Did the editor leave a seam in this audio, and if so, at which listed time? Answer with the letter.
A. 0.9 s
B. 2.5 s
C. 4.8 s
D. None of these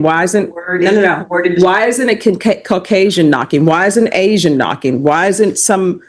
D